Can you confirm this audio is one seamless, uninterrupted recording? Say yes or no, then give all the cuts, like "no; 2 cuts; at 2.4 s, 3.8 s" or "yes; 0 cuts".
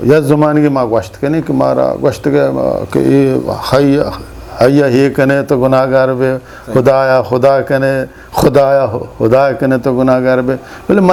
yes; 0 cuts